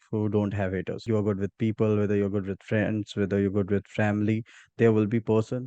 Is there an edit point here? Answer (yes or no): yes